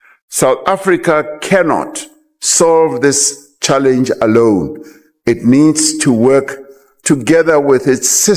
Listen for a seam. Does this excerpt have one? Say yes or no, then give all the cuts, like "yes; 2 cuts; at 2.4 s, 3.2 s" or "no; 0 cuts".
no; 0 cuts